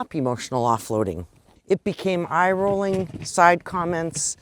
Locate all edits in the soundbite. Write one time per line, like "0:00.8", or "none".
0:01.5